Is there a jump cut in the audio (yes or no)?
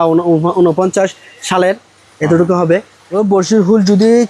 yes